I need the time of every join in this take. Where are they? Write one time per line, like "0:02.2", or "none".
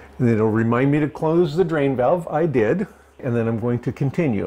0:03.2

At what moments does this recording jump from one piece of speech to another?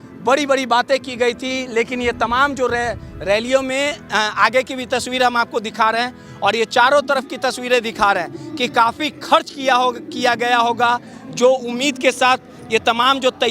none

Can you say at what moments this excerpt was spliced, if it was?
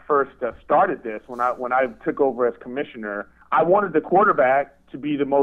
0:03.4

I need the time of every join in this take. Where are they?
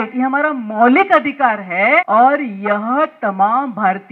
0:02.1

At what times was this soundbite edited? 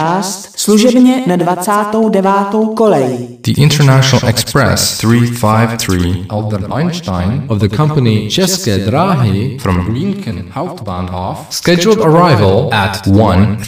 0:03.3

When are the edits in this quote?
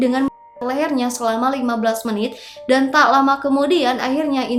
none

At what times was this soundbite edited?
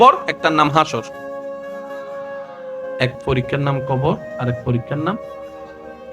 0:01.2
0:02.8

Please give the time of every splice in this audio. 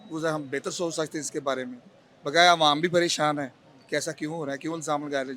none

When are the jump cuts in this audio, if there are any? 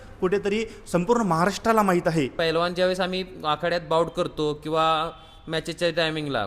0:02.3

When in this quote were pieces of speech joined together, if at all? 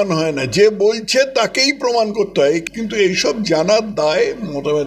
0:02.7

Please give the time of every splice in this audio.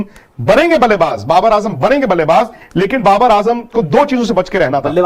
none

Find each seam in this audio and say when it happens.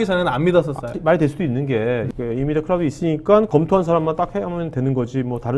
0:01.0
0:02.1
0:03.5

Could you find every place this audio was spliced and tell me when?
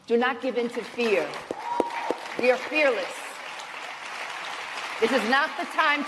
none

